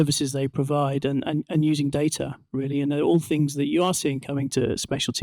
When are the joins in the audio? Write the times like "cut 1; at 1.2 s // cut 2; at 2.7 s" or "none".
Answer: none

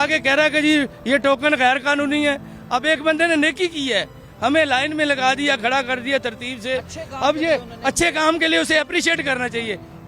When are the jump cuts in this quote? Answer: none

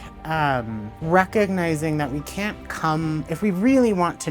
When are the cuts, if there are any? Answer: cut 1; at 0.9 s

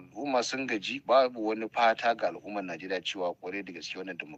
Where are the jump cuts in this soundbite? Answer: none

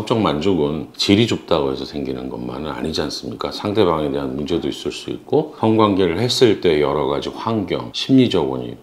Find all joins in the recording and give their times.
cut 1; at 0.9 s

